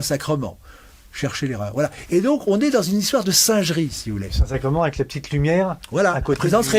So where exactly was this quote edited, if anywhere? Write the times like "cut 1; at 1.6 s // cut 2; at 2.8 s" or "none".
none